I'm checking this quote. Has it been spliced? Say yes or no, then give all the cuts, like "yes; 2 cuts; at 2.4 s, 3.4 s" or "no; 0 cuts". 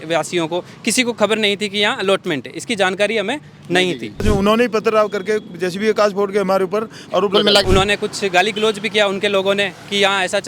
yes; 2 cuts; at 4.2 s, 7.6 s